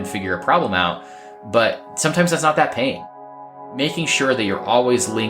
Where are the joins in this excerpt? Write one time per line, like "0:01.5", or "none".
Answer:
0:01.9
0:03.6